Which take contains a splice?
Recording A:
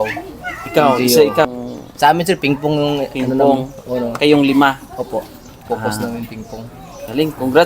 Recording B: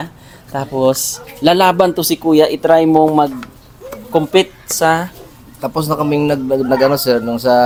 A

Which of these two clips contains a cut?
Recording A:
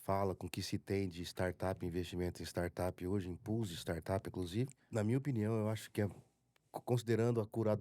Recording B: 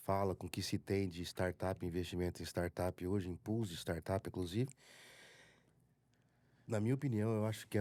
A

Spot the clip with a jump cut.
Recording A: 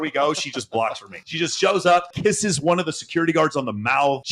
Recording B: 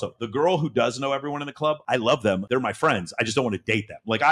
A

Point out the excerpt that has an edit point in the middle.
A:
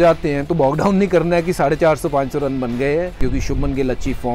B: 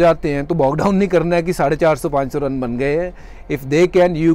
A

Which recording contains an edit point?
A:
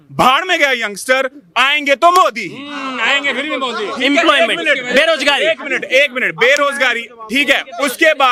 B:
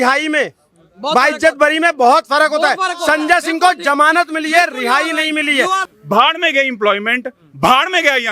B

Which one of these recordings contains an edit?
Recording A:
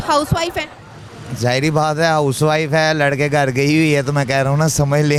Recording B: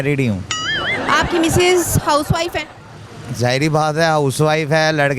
B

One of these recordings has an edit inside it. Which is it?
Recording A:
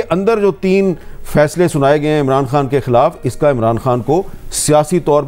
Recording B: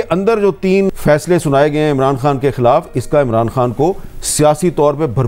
B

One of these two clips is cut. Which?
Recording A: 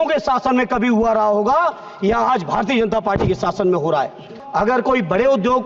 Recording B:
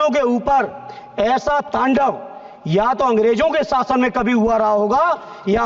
A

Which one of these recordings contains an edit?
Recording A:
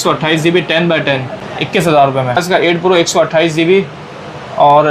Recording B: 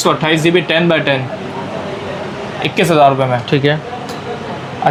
A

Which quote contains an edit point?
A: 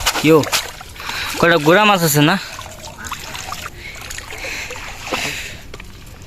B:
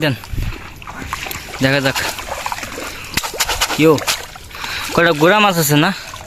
A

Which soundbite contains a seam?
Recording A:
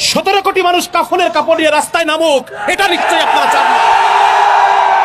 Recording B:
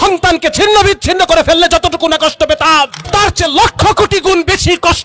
B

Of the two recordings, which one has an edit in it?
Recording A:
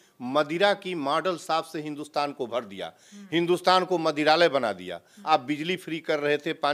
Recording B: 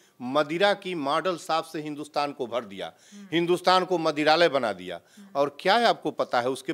A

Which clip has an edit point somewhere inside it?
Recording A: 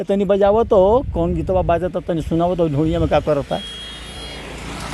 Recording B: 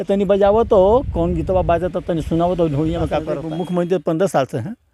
B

